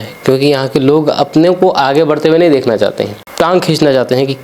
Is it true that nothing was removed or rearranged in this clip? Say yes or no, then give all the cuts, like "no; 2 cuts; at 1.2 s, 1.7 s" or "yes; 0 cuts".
no; 1 cut; at 3.2 s